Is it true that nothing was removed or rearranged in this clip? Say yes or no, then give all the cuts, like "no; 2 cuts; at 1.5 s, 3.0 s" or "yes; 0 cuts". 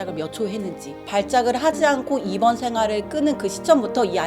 no; 1 cut; at 1.0 s